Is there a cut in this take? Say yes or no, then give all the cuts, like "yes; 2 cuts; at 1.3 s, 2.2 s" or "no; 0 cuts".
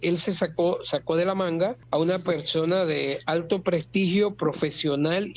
yes; 1 cut; at 1.8 s